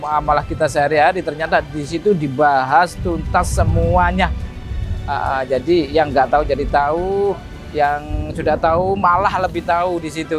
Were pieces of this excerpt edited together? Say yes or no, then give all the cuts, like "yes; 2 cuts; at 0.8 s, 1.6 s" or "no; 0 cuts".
no; 0 cuts